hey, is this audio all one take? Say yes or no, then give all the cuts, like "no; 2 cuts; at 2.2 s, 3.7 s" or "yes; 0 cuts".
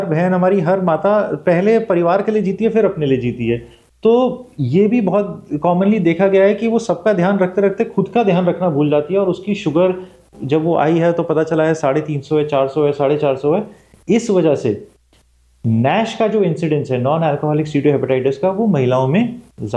yes; 0 cuts